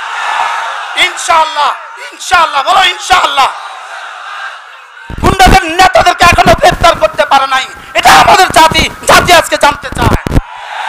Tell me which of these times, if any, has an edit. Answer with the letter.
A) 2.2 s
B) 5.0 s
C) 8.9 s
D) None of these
B